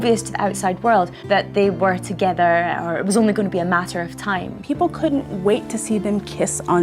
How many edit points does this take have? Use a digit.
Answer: 2